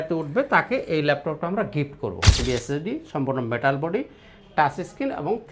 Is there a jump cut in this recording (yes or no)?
yes